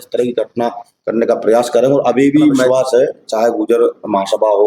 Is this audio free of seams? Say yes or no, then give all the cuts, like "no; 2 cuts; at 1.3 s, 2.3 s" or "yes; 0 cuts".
no; 1 cut; at 2.7 s